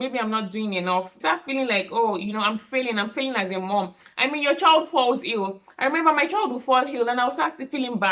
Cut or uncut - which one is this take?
cut